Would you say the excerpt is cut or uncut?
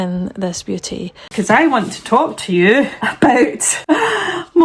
cut